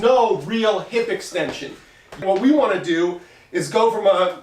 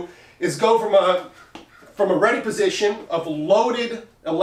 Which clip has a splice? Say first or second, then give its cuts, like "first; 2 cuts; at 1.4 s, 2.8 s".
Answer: first; 1 cut; at 2.2 s